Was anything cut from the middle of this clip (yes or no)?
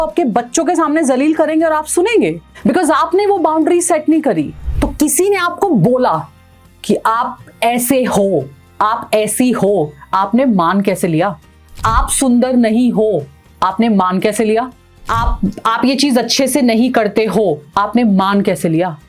yes